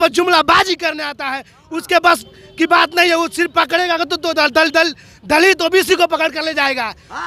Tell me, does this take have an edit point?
no; 0 cuts

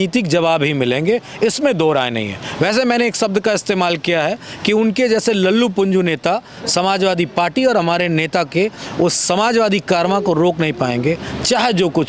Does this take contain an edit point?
no; 0 cuts

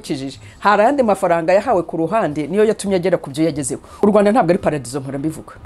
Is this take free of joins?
no; 1 cut; at 4.0 s

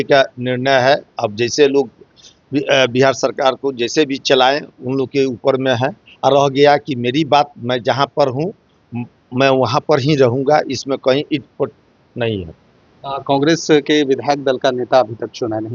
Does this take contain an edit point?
no; 0 cuts

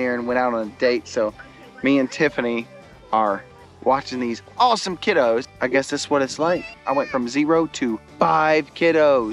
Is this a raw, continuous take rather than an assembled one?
yes; 0 cuts

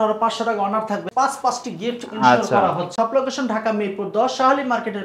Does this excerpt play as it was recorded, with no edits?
no; 2 cuts; at 1.1 s, 2.9 s

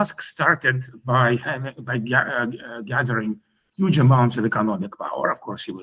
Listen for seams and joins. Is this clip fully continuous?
yes; 0 cuts

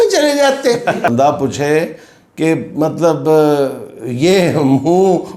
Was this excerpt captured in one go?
no; 1 cut; at 1.1 s

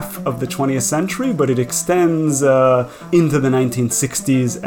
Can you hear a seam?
yes; 1 cut; at 3.1 s

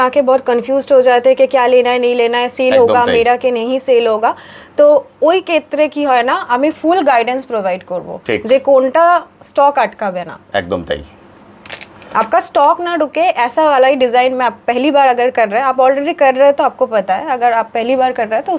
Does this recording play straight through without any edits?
yes; 0 cuts

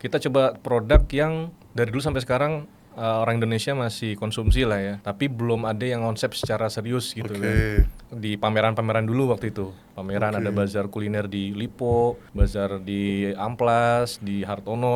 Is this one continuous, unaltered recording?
no; 3 cuts; at 5.0 s, 8.1 s, 12.3 s

